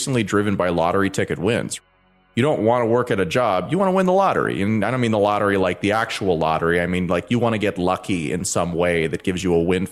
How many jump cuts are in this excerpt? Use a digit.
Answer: 1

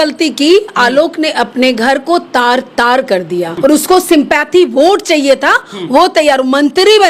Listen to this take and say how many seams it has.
1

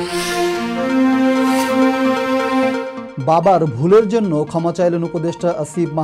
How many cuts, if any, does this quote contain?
1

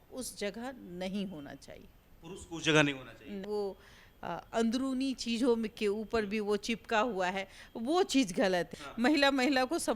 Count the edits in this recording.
2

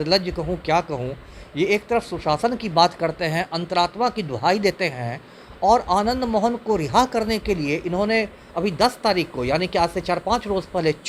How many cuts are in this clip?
0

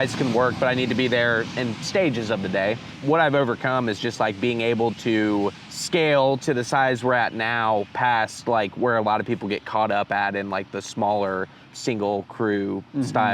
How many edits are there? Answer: 3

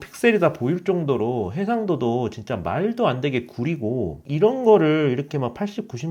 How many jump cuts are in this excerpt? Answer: 1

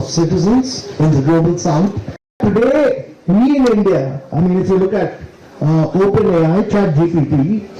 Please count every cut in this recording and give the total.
1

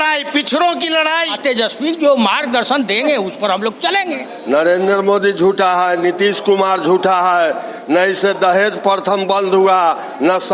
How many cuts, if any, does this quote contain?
2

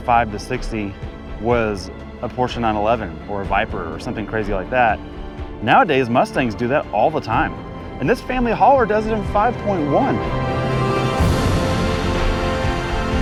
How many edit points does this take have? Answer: 0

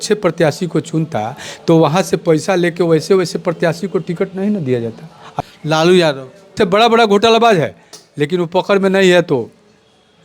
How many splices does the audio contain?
1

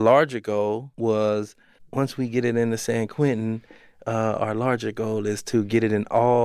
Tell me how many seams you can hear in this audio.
2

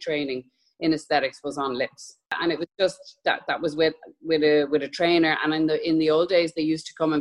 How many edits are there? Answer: 1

